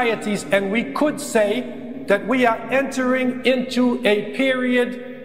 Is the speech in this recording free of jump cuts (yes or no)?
yes